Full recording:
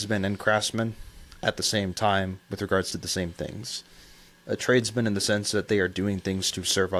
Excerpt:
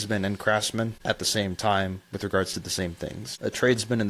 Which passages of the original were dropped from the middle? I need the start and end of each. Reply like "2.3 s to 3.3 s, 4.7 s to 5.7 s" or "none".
1.0 s to 1.3 s, 3.6 s to 4.3 s